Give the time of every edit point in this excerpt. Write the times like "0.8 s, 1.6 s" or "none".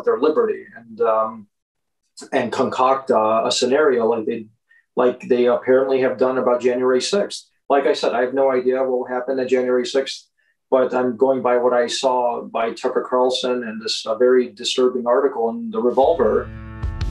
none